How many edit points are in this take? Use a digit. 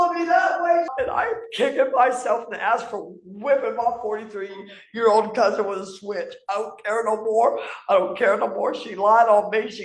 1